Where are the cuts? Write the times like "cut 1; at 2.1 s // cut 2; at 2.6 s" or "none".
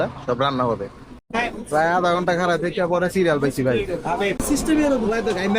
cut 1; at 1.2 s // cut 2; at 4.4 s